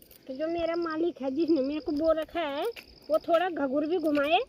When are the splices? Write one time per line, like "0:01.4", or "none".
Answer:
none